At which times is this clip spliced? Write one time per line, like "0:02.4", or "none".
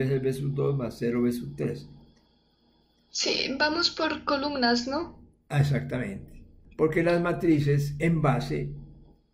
0:06.6